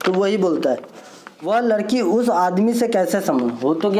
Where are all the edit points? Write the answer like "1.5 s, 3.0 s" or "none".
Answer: 1.5 s